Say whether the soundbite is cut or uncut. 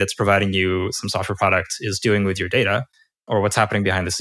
uncut